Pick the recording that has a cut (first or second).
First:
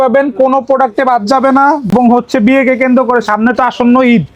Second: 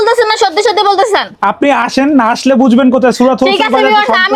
first